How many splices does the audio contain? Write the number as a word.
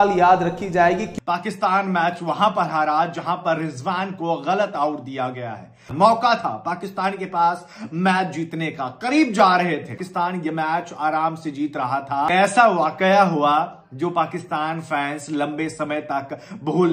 four